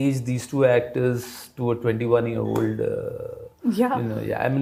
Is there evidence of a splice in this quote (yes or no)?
no